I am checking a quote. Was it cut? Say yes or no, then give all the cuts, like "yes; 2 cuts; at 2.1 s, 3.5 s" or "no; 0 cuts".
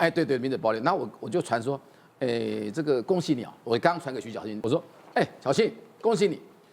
yes; 1 cut; at 4.6 s